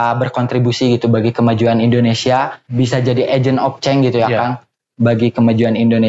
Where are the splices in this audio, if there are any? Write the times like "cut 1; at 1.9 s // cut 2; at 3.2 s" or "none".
cut 1; at 2.6 s